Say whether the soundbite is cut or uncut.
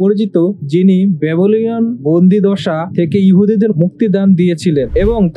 uncut